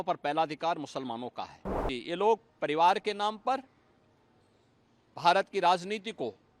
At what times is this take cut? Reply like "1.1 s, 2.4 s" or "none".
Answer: 1.9 s